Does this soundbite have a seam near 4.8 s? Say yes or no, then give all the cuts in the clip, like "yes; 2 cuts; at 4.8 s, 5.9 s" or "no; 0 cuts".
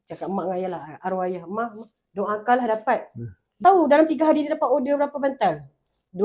no; 1 cut; at 3.5 s